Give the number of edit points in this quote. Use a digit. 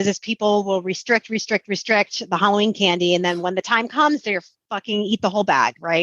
0